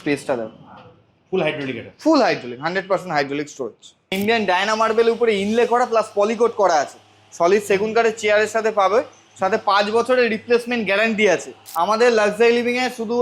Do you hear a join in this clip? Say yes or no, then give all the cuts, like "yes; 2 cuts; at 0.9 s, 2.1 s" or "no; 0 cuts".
yes; 2 cuts; at 4.1 s, 11.6 s